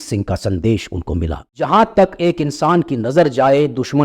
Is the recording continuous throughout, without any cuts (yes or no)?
no